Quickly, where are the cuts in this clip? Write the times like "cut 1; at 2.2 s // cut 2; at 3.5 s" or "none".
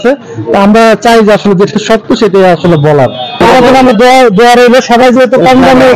cut 1; at 3.4 s